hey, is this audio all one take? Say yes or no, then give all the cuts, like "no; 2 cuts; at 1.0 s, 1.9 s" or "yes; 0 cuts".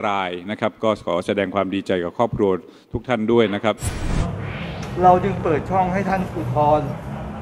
no; 1 cut; at 3.9 s